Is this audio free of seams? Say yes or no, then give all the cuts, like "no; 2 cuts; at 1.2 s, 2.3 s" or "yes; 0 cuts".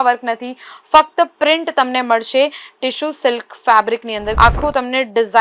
no; 1 cut; at 4.3 s